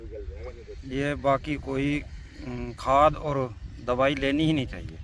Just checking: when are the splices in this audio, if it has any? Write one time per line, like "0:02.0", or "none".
none